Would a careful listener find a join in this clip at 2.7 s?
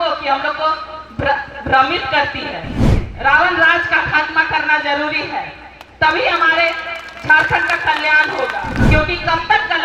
yes; 2 cuts; at 2.7 s, 8.8 s

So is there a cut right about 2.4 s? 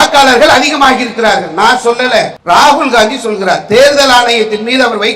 yes; 1 cut; at 2.4 s

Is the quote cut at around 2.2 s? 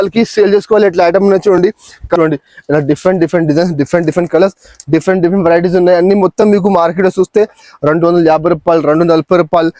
yes; 1 cut; at 2.2 s

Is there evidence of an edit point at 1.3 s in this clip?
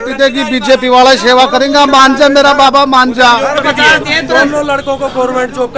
no; 1 cut; at 3.6 s

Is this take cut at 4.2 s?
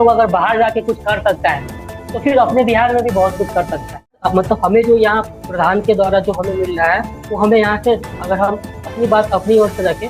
yes; 1 cut; at 4.2 s

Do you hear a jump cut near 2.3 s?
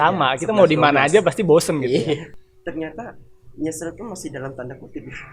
yes; 1 cut; at 2.3 s

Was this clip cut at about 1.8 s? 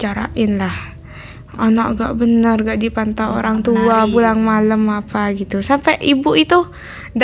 no; 0 cuts

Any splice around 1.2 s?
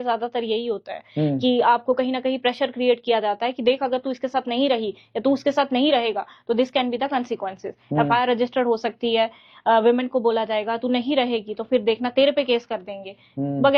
no; 0 cuts

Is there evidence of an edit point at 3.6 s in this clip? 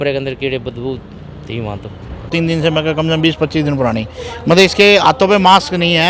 no; 1 cut; at 2.3 s

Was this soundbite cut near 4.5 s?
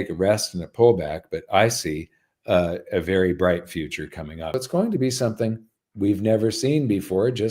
yes; 1 cut; at 4.5 s

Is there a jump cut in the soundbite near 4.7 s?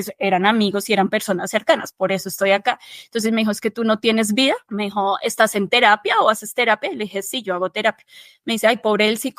yes; 1 cut; at 4.7 s

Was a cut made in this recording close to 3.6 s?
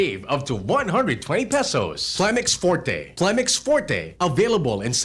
no; 1 cut; at 2.1 s

